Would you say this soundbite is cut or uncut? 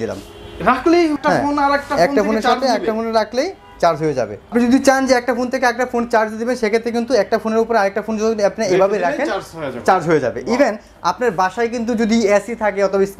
uncut